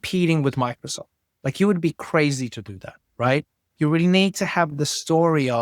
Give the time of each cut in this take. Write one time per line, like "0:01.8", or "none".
0:03.6